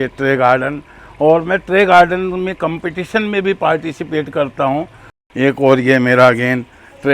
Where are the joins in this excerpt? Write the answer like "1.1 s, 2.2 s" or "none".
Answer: 5.1 s

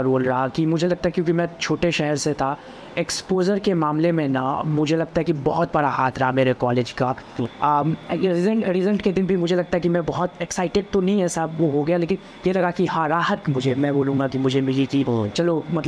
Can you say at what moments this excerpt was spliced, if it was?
7.4 s

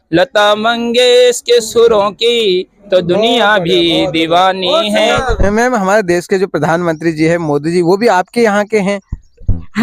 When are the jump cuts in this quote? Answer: 5.3 s

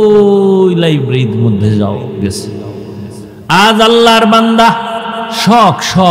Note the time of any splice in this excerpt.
3.3 s

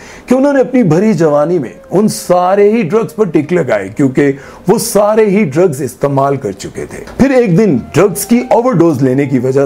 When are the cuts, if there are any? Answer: 7.0 s

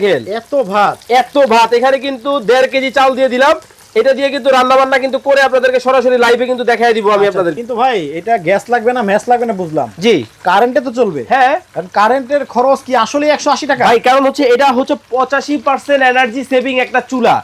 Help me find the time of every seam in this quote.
7.6 s

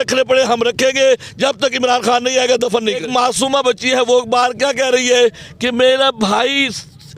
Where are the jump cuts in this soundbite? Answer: 3.0 s

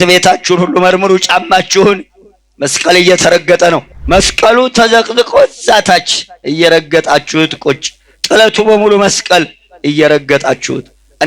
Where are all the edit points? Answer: 3.9 s

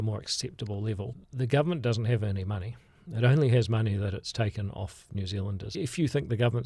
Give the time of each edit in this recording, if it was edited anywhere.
1.0 s, 5.7 s

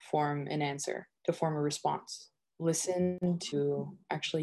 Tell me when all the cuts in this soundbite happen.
3.2 s

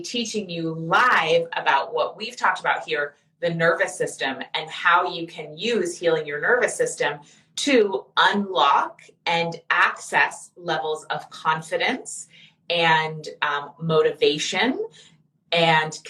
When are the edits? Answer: none

